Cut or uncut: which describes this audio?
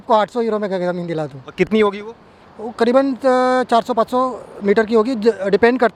uncut